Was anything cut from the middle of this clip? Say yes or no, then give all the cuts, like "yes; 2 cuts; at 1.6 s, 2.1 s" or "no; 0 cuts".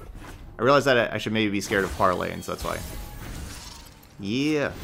no; 0 cuts